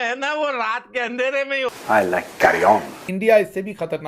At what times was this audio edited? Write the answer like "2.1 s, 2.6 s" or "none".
1.7 s, 3.0 s